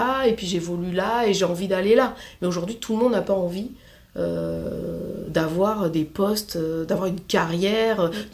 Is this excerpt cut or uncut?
uncut